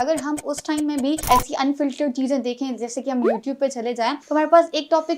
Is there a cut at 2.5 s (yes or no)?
no